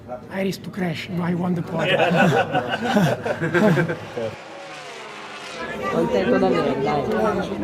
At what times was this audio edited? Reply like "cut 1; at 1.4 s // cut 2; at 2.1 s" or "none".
none